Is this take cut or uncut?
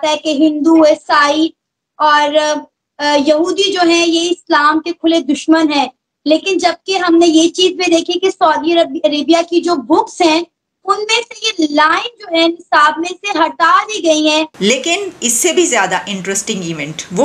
cut